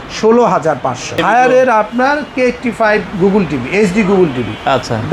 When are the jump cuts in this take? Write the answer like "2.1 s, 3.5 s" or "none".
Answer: 1.2 s